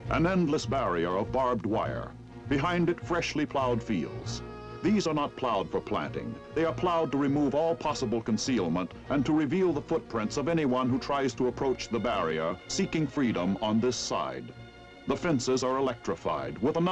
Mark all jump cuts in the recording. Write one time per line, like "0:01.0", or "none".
0:13.8